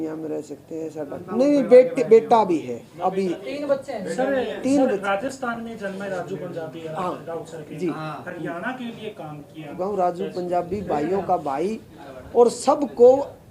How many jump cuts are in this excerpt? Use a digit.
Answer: 2